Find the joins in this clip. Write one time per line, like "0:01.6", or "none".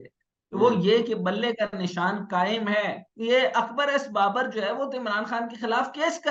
0:03.1